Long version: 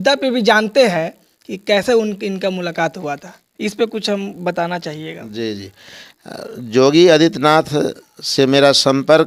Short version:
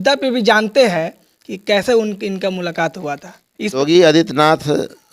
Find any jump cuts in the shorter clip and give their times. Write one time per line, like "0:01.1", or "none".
0:03.8